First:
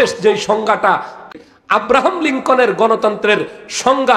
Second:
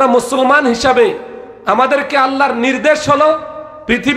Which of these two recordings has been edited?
first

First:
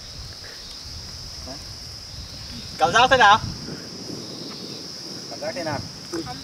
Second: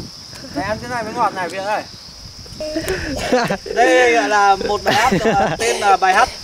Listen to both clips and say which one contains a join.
second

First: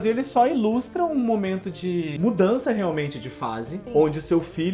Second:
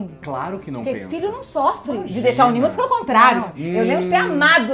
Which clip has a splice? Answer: first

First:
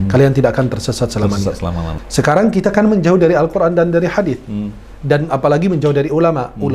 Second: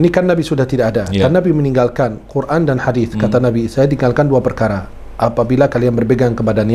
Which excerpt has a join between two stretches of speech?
first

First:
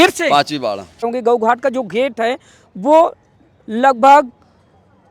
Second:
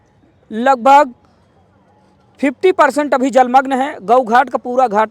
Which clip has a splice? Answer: first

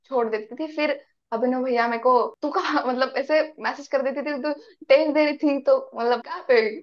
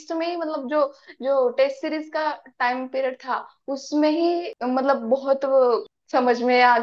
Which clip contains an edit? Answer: second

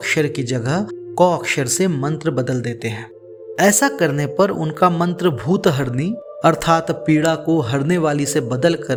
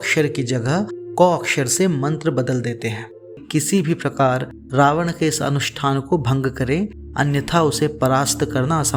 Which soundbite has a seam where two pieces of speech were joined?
second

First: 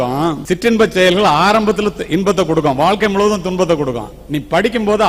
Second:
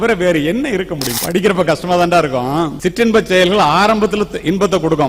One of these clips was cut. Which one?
second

